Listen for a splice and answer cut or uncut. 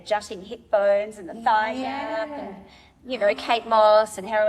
uncut